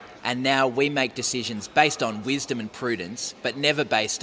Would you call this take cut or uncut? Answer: uncut